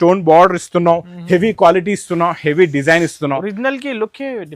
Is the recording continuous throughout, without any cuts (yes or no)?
yes